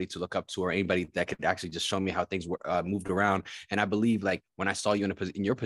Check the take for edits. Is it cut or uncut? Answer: uncut